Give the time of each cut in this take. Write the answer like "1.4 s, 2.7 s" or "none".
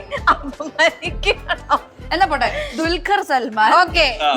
none

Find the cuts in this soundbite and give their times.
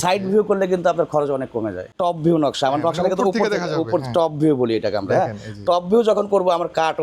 2.0 s

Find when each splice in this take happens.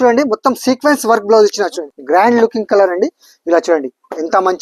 1.9 s

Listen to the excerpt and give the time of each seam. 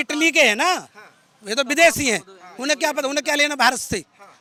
none

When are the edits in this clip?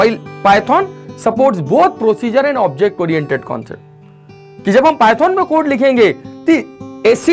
none

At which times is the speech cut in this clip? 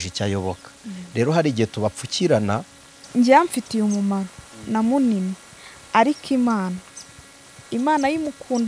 3.0 s

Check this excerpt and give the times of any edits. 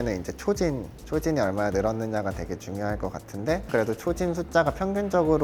0.9 s, 3.7 s

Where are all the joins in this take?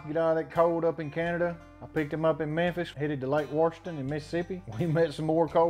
4.6 s

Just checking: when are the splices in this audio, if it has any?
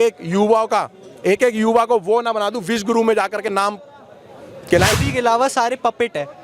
5.0 s

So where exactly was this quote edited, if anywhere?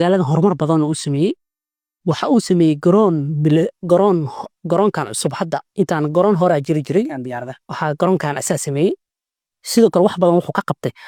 none

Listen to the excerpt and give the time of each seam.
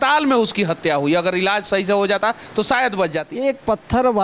3.2 s

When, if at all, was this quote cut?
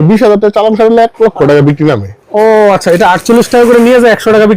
2.2 s

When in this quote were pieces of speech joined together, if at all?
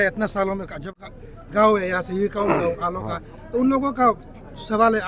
0.9 s

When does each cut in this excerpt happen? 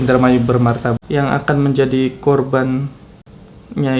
1.0 s

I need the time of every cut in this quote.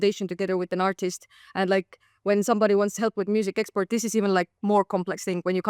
none

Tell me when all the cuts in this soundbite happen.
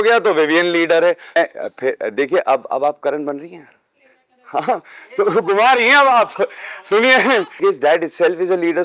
1.4 s, 7.6 s

